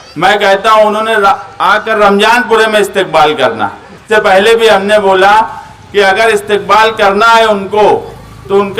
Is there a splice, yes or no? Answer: yes